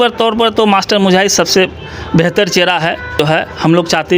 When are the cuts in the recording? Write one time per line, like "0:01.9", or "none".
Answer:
0:03.2